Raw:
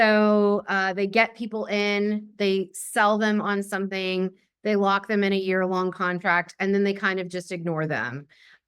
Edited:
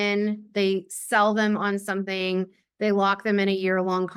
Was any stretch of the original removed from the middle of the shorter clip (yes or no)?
no